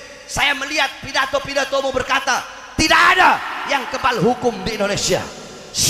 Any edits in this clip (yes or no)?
no